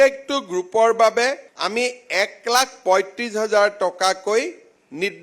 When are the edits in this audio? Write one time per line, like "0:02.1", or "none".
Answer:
0:01.5